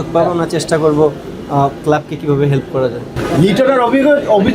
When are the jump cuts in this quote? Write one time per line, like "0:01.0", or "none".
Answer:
0:03.1